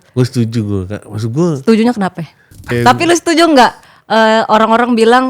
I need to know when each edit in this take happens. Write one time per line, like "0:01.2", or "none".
0:02.7